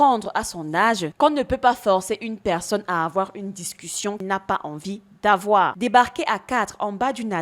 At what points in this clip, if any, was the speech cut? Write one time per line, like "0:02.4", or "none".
0:05.8